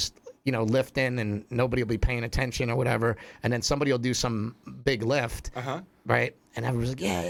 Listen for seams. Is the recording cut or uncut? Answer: uncut